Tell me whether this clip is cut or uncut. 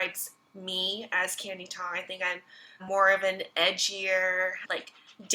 uncut